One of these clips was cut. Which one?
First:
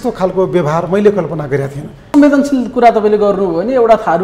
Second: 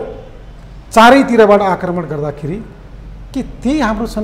first; 1 cut; at 2.1 s

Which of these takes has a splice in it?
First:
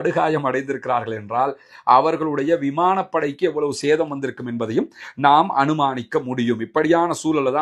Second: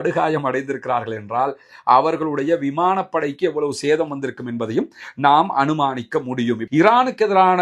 second; 1 cut; at 6.6 s

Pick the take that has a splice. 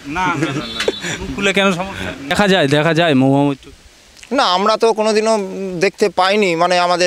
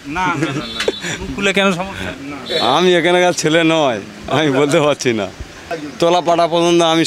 first; 1 cut; at 2.3 s

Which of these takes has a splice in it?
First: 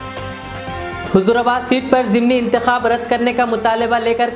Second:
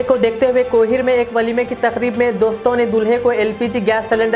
first; 1 cut; at 1.0 s

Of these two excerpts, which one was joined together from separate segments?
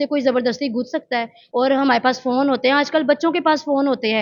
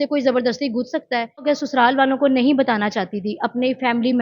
second; 1 cut; at 1.4 s

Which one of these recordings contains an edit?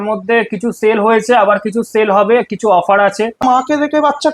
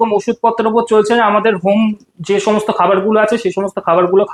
first; 1 cut; at 3.4 s

